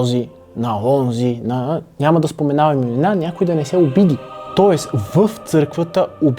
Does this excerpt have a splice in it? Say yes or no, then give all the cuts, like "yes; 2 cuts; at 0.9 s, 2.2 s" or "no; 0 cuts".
yes; 1 cut; at 4.4 s